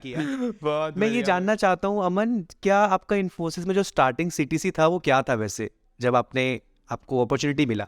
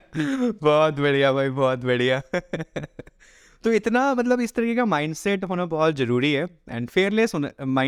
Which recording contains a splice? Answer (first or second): first